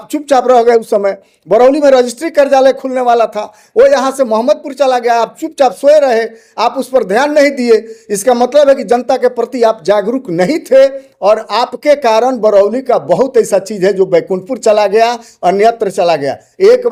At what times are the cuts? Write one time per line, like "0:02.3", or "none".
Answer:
none